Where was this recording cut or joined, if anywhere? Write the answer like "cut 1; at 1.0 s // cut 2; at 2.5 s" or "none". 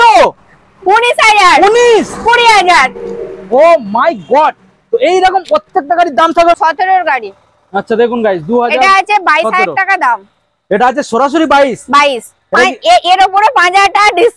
cut 1; at 6.6 s